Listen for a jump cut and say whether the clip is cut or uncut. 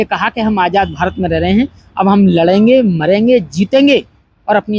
uncut